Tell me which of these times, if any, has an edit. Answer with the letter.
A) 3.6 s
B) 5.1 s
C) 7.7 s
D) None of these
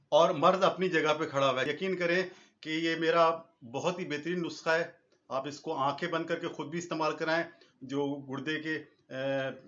D